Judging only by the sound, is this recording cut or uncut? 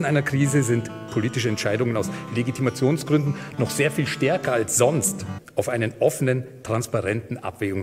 uncut